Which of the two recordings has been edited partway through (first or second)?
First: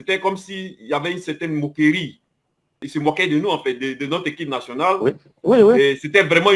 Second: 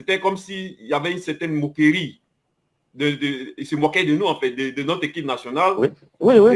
first